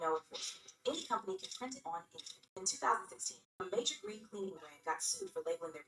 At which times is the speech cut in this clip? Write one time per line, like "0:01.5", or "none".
0:01.6